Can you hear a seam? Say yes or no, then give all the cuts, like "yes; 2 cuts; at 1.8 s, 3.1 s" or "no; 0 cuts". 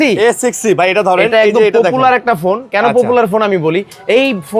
no; 0 cuts